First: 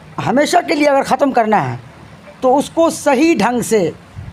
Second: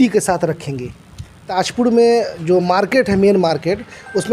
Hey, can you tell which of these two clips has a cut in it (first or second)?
second